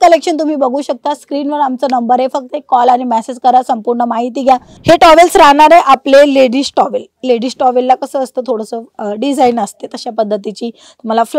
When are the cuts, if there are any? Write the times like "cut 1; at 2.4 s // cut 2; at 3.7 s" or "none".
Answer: cut 1; at 4.7 s